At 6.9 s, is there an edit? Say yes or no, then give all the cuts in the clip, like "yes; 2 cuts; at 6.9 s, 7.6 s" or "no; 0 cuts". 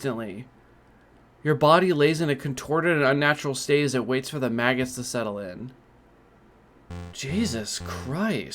yes; 1 cut; at 6.9 s